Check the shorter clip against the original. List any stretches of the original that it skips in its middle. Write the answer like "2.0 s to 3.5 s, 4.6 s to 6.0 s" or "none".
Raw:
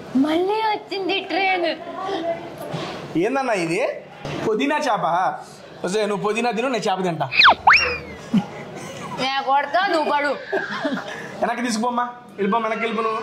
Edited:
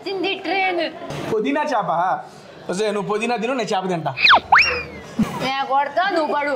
1.9 s to 4.2 s, 8.4 s to 9.0 s